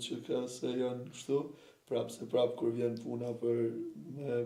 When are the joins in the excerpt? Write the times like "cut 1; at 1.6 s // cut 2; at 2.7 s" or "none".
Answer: none